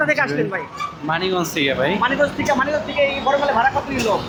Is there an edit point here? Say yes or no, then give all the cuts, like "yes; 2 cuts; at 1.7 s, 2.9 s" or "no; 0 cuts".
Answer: no; 0 cuts